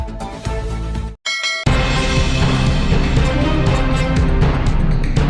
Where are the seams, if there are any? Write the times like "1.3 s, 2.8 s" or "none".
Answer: none